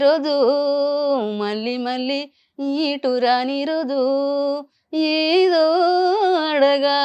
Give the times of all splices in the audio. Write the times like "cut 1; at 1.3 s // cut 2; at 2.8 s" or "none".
none